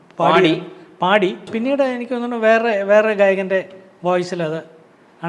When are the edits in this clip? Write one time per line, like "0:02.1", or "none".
0:01.5